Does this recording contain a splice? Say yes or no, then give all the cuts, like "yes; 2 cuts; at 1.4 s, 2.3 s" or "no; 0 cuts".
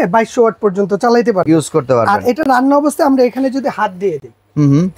no; 0 cuts